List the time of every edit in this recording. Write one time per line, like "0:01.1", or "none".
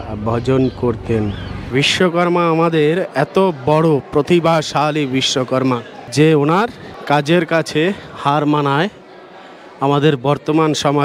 0:01.7
0:06.1
0:06.9